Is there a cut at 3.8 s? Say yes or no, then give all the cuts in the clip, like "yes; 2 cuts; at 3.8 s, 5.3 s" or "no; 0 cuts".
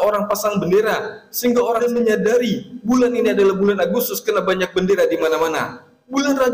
no; 1 cut; at 1.8 s